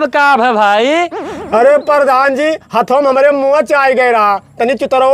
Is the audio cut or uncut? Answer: uncut